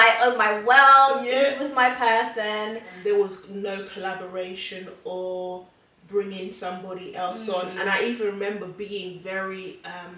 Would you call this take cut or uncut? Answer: cut